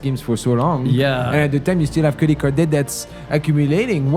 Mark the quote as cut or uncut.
uncut